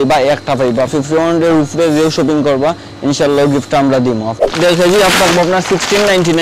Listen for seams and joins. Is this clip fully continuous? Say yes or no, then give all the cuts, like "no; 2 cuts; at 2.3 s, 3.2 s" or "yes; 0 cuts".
no; 2 cuts; at 0.9 s, 4.4 s